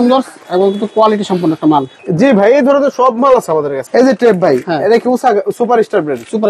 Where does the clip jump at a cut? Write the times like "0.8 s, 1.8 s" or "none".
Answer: 2.0 s, 3.8 s